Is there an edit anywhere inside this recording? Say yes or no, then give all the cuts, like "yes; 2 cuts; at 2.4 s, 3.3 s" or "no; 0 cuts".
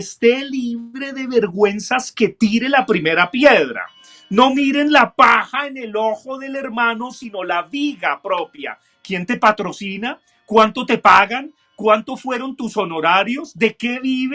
no; 0 cuts